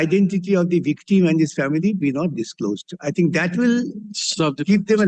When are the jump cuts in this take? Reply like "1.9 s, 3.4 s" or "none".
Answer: none